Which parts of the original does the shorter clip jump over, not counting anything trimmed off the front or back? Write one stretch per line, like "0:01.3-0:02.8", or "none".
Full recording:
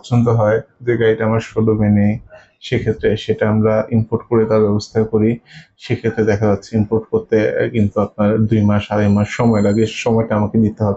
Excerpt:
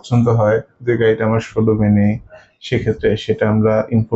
none